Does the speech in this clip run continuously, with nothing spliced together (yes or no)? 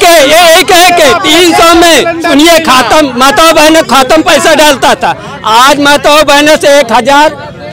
yes